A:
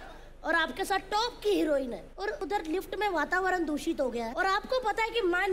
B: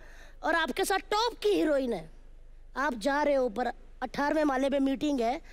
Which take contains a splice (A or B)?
A